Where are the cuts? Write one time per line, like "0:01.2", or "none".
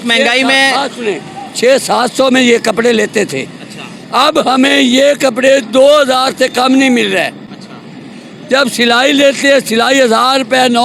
none